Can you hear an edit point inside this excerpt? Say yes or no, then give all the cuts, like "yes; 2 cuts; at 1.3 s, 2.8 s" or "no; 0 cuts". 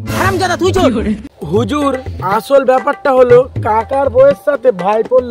yes; 1 cut; at 1.3 s